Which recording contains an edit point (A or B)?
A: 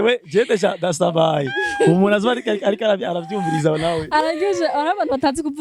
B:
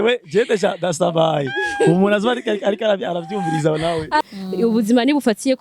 B